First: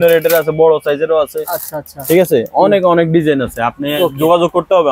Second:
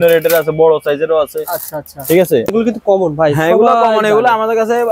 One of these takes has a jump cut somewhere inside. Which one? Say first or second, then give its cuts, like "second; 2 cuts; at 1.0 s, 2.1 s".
second; 1 cut; at 2.5 s